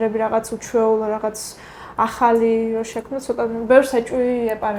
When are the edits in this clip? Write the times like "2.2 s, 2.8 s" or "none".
none